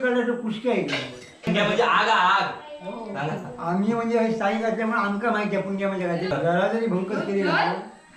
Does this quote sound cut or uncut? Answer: cut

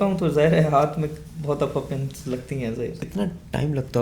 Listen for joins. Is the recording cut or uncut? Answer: cut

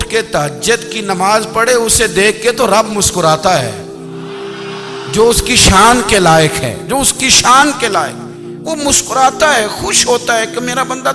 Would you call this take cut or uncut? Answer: uncut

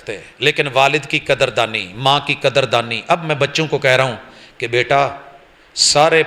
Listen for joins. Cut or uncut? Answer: uncut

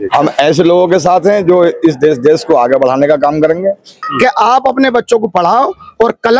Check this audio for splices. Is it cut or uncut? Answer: cut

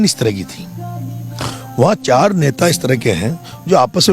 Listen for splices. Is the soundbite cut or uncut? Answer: uncut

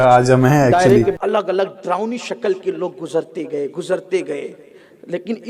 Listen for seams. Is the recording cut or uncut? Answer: cut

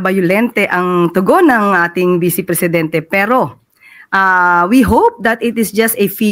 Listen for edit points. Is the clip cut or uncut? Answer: uncut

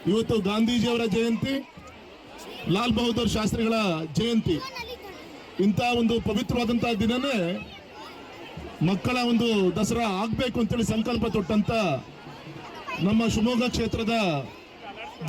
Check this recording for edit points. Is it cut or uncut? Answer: cut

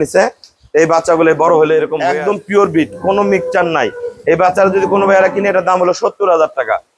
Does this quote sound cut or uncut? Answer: cut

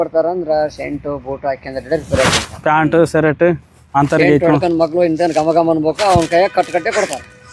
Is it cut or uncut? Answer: uncut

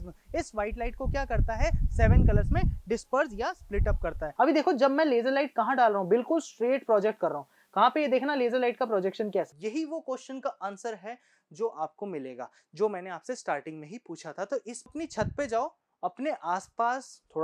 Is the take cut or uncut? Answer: cut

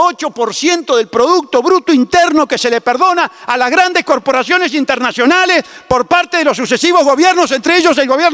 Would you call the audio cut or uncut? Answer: uncut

